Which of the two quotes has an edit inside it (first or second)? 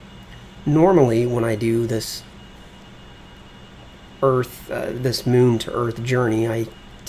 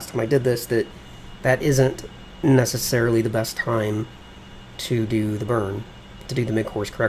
first